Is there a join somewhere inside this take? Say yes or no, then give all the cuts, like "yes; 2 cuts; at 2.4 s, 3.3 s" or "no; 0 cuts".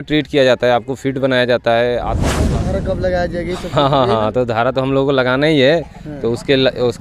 yes; 1 cut; at 2.3 s